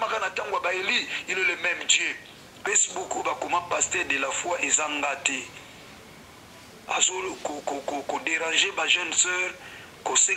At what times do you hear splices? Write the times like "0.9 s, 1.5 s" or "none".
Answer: 2.5 s